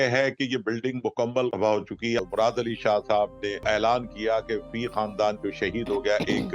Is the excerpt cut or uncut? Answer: cut